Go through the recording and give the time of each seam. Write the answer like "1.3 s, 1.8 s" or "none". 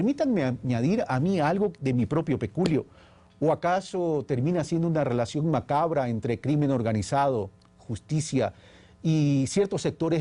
4.3 s